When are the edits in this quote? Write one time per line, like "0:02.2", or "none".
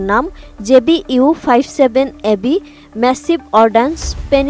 none